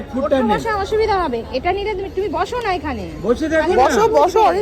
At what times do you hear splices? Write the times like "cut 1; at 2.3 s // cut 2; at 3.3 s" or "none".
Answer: none